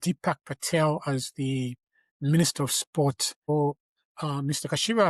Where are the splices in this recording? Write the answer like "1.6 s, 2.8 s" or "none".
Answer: 3.5 s